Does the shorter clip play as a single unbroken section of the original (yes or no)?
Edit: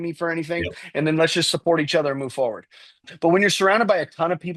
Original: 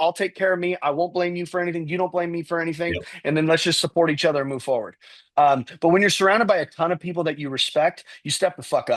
no